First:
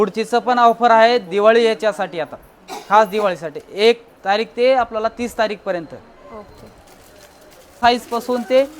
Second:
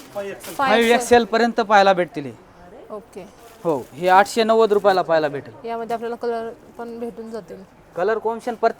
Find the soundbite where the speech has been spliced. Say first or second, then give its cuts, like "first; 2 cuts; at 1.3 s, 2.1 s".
first; 1 cut; at 7.8 s